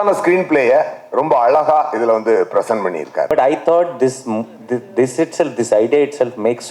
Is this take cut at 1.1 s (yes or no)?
no